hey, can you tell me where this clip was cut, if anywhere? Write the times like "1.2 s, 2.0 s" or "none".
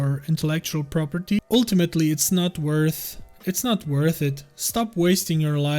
1.4 s